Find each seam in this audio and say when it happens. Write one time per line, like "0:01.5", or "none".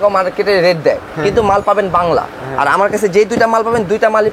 none